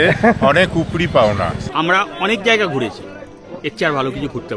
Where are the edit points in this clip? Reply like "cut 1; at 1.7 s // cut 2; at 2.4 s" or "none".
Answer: cut 1; at 1.6 s